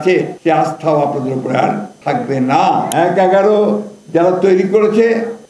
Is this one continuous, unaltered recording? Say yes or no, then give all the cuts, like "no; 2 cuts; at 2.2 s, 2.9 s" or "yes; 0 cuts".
no; 1 cut; at 2.9 s